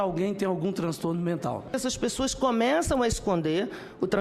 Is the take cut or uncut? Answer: cut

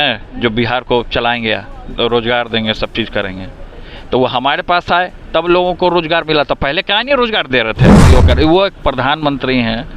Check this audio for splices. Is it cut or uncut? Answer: cut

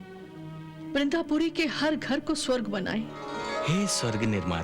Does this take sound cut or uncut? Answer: cut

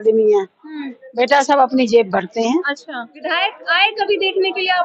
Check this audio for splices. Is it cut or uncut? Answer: cut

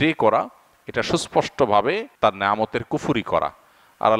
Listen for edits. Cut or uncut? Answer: cut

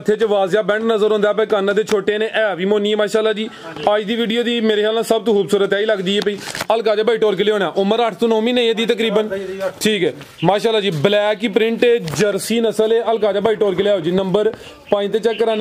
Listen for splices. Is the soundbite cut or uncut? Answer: uncut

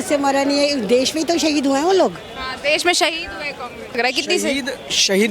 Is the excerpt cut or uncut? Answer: cut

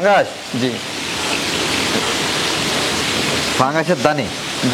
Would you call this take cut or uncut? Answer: uncut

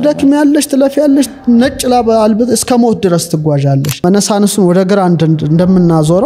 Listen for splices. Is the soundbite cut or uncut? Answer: cut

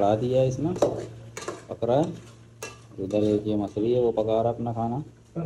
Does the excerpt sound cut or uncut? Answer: uncut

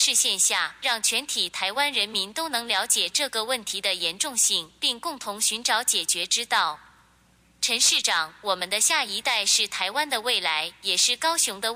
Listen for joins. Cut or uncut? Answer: uncut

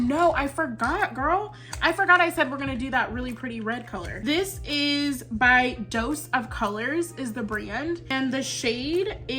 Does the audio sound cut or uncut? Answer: cut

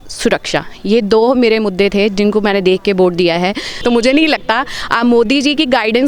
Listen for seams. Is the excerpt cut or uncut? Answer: cut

